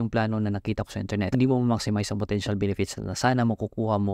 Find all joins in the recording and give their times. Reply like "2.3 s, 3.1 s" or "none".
1.3 s